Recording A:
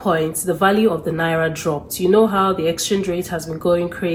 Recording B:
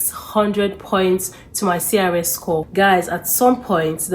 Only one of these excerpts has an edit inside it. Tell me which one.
B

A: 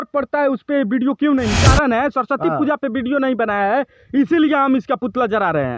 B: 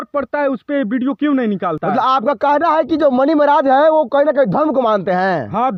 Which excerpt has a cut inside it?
A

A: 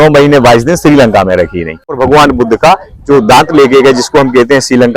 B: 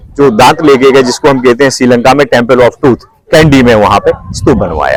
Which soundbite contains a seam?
A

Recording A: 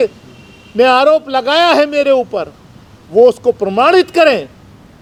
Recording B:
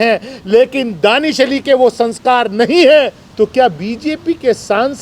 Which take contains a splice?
B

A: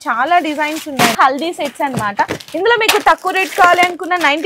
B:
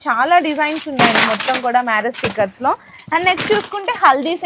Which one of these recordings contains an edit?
A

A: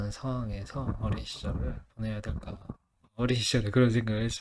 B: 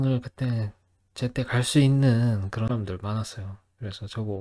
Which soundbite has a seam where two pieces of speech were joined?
B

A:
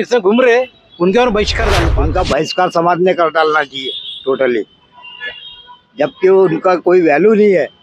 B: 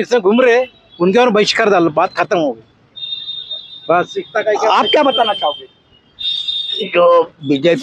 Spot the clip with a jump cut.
A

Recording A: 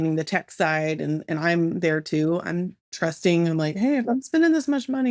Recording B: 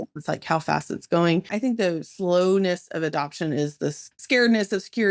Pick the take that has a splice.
B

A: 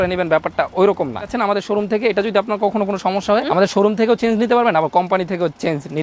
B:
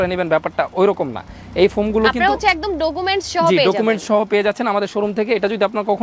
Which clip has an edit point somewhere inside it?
A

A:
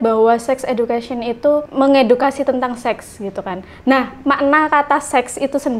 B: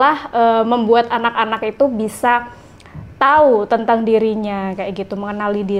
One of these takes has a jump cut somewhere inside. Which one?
A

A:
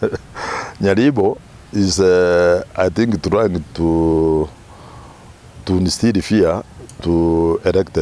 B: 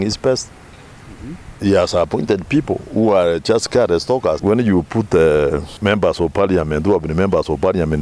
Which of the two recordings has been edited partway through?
B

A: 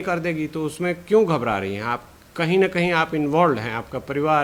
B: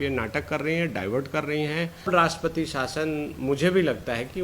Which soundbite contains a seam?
B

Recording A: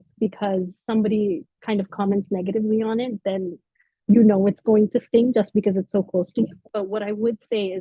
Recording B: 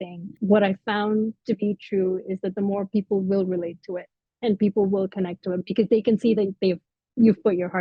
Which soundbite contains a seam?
A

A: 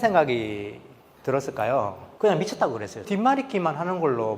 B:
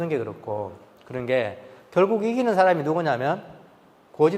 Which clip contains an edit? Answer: A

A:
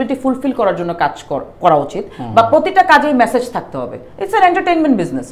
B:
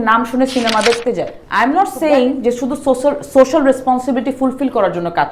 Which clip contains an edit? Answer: B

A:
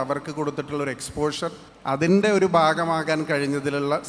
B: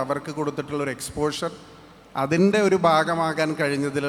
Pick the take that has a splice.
A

